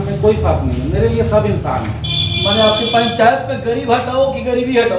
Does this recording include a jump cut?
no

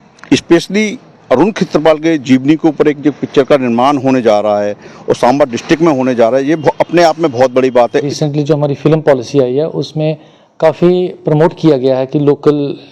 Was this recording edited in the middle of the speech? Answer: yes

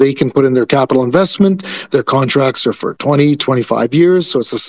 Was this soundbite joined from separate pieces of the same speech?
no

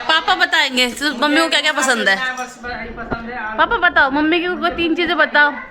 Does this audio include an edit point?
no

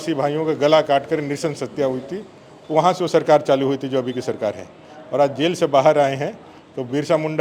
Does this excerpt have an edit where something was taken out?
no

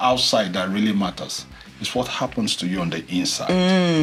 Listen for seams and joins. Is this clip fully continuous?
yes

